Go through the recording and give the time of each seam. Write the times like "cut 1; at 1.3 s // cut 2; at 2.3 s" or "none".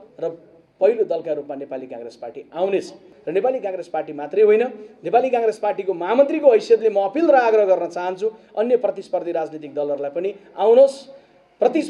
cut 1; at 3.1 s